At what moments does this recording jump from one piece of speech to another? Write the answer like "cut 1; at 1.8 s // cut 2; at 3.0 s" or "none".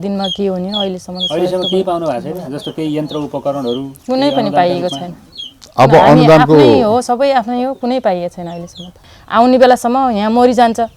cut 1; at 8.9 s